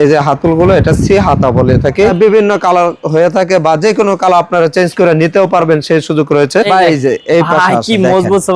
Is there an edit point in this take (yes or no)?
yes